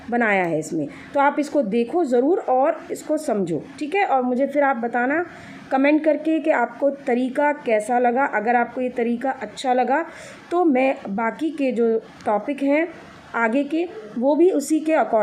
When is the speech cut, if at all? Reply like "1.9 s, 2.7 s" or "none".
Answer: none